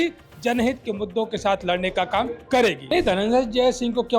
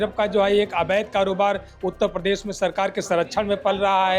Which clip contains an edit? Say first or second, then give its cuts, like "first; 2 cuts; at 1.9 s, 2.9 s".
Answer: first; 1 cut; at 2.8 s